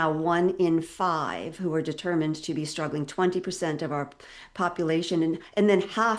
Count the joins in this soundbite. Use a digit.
0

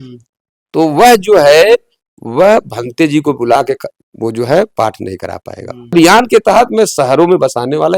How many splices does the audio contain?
1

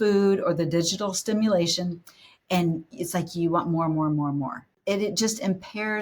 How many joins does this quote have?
1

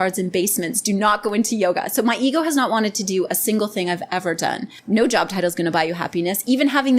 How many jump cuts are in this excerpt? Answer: 1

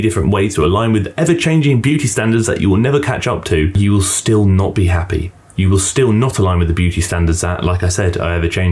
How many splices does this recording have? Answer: 1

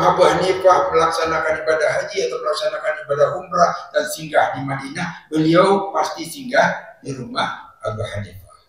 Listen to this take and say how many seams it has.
0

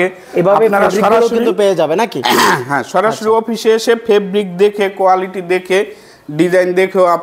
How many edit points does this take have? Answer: 0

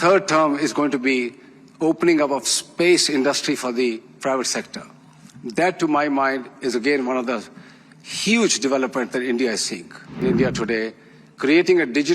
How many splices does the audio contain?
1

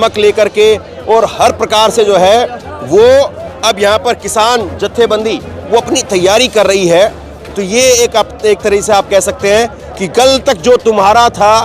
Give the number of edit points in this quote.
1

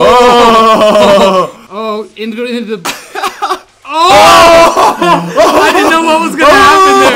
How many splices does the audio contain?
1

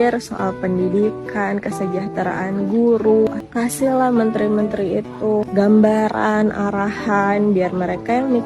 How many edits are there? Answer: 1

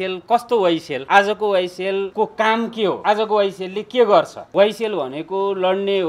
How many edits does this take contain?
4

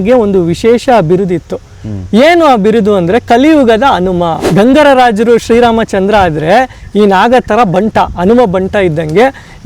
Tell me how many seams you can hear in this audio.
1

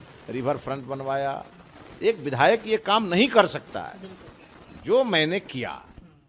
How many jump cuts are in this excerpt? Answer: 0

